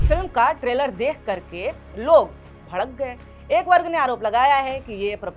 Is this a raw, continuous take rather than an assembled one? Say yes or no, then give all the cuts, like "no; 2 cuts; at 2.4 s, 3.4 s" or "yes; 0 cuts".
yes; 0 cuts